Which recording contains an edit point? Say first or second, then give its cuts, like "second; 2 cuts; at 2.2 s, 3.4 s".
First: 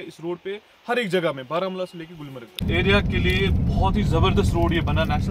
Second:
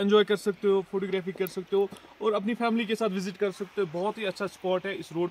first; 1 cut; at 2.6 s